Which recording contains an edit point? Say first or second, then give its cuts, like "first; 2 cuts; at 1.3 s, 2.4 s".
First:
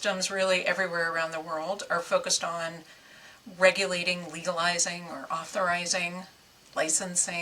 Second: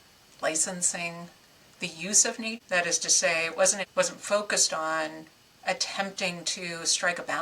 second; 2 cuts; at 2.6 s, 3.8 s